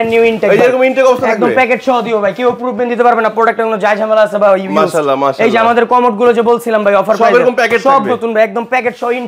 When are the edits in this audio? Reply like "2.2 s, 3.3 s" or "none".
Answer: none